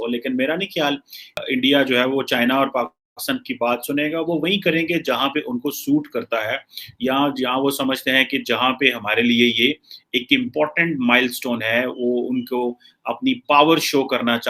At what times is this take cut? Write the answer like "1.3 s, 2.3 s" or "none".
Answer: 1.4 s